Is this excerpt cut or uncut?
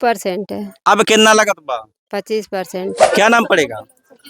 cut